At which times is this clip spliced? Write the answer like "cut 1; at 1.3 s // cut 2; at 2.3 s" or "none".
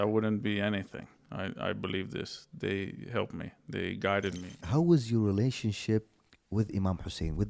cut 1; at 4.5 s